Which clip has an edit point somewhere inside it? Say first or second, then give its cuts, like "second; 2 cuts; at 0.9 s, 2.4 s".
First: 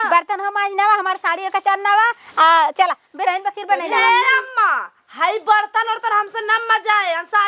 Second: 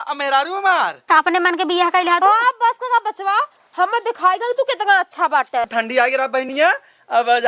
second; 2 cuts; at 1.0 s, 5.7 s